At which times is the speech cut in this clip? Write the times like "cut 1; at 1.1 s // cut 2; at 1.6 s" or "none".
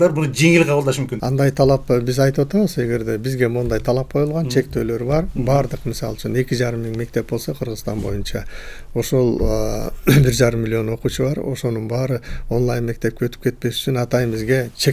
cut 1; at 1.1 s

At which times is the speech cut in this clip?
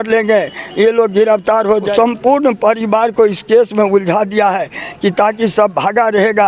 cut 1; at 1.9 s

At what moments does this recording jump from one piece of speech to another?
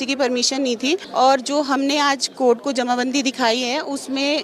cut 1; at 1.1 s

